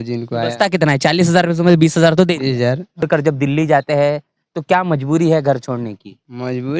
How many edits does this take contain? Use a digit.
1